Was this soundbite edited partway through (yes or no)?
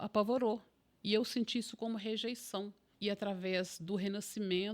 yes